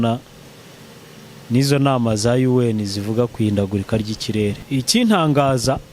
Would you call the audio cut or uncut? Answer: cut